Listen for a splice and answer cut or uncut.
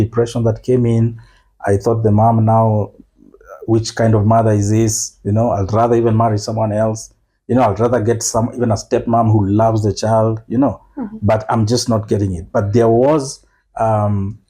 uncut